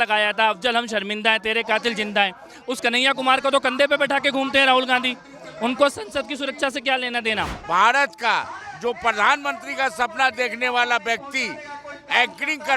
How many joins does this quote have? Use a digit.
1